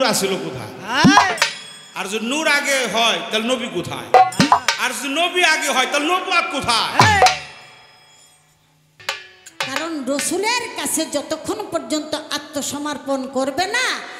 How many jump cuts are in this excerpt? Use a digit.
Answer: 1